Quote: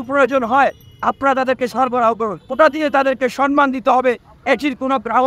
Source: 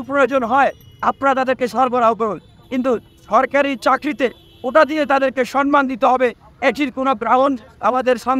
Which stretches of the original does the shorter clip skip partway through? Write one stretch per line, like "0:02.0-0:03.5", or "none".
0:02.4-0:04.6